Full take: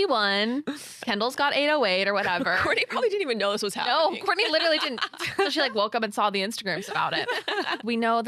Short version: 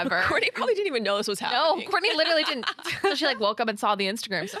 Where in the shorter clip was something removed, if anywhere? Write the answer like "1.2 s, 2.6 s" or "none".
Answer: none